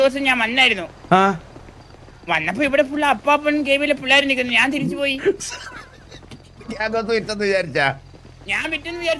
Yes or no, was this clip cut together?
no